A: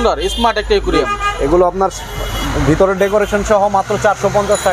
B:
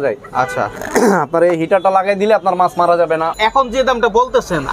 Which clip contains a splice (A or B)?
B